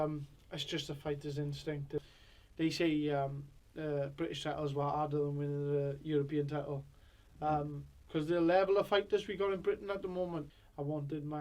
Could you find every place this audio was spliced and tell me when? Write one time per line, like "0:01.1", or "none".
0:02.0
0:10.5